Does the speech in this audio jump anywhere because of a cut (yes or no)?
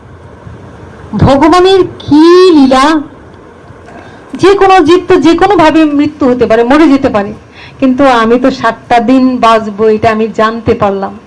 no